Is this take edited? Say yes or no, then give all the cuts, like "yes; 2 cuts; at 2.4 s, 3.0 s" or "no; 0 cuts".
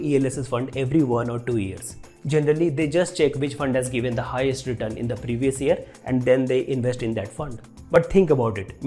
no; 0 cuts